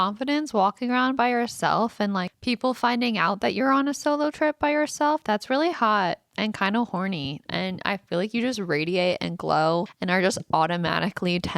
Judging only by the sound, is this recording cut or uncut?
cut